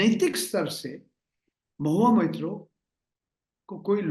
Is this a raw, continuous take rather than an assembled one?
yes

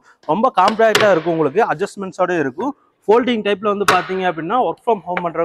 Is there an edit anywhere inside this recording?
no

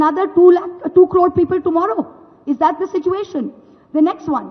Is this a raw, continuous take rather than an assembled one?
yes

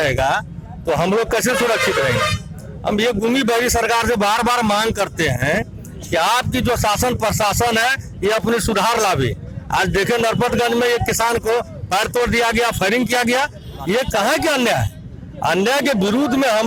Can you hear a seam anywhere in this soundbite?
no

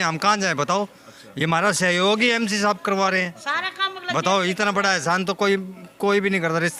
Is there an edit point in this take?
no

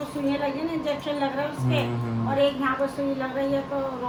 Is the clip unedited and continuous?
yes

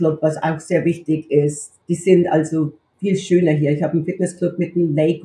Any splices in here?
yes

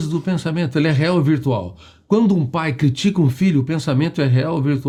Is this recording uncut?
yes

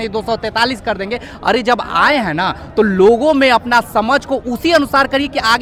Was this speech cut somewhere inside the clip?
no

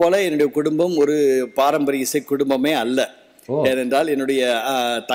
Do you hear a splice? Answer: no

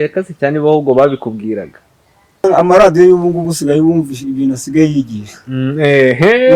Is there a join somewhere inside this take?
yes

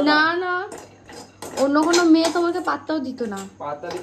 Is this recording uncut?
yes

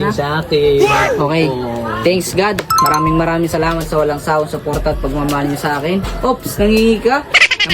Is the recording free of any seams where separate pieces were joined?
yes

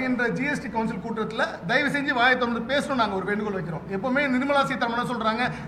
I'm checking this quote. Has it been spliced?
no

